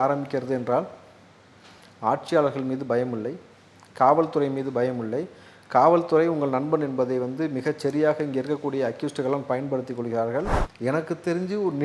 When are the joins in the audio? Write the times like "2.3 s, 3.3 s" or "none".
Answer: 10.6 s